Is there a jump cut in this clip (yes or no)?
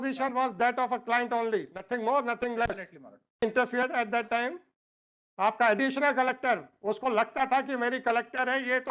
yes